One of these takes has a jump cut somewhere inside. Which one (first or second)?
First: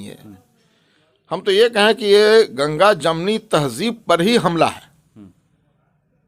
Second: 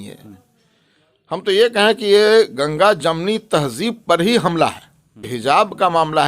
second